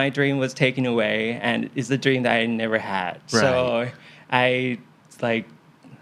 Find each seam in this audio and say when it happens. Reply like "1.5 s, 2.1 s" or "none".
none